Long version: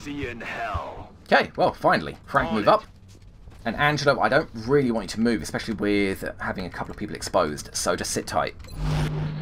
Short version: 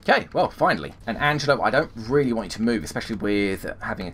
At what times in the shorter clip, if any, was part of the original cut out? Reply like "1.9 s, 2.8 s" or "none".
0.9 s